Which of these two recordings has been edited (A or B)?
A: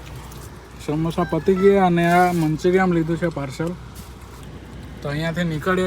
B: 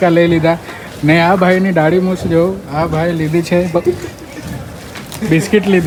A